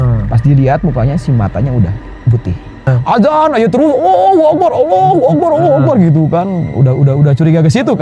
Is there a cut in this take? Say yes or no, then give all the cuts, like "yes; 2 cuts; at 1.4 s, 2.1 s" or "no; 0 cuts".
yes; 1 cut; at 2.9 s